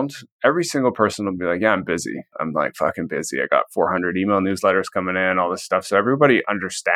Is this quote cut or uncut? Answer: cut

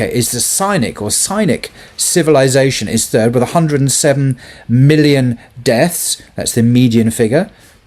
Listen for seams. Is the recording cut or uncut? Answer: uncut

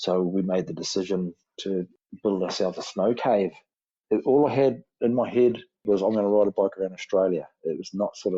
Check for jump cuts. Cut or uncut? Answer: cut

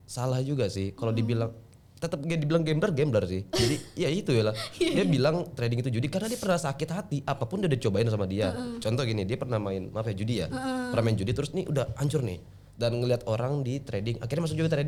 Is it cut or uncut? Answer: uncut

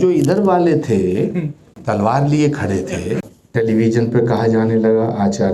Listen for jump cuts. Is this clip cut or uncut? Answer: cut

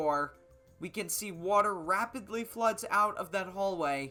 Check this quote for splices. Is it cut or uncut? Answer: uncut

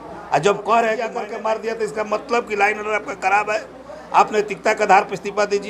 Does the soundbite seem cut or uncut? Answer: cut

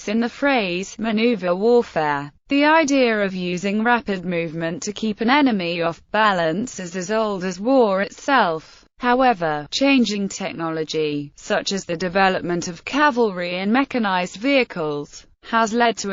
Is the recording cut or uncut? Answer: uncut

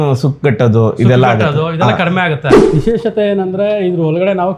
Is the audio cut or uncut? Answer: cut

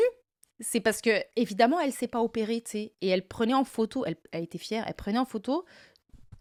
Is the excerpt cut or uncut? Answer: uncut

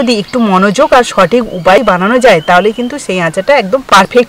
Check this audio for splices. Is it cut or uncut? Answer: cut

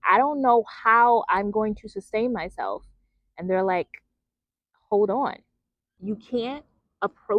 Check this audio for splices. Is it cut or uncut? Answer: cut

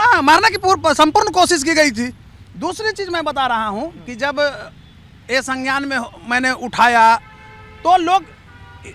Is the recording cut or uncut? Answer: uncut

